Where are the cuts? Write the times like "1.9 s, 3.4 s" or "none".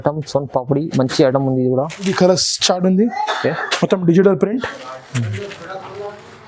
2.1 s